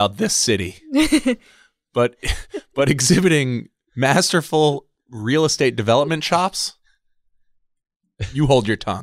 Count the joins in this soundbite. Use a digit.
0